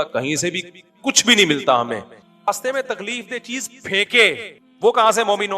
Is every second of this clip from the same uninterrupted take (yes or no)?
no